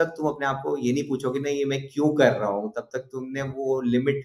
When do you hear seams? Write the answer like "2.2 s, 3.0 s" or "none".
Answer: none